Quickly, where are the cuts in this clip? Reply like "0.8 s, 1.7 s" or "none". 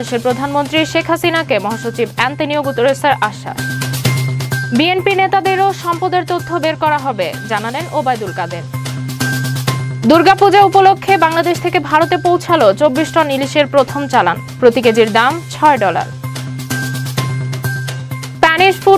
3.6 s

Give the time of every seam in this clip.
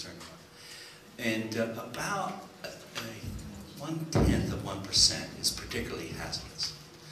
none

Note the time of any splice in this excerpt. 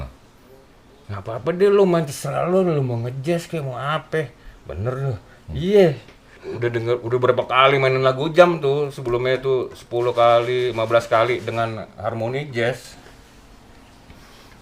6.4 s

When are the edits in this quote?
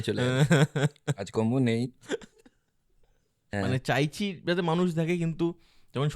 3.5 s

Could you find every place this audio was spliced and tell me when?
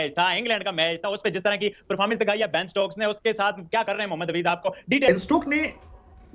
5.1 s

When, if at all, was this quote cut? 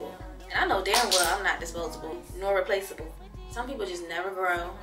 none

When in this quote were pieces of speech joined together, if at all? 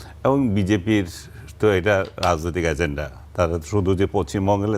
none

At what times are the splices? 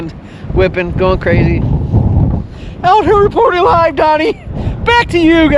none

